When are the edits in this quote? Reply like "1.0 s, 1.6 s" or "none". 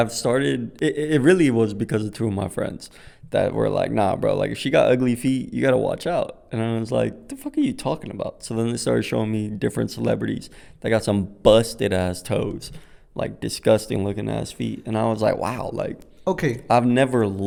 none